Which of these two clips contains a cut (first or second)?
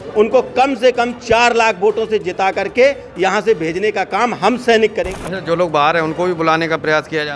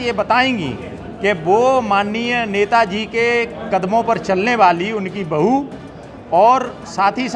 first